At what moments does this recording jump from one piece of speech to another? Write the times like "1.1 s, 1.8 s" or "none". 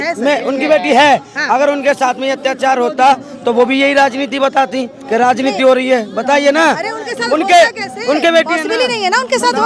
none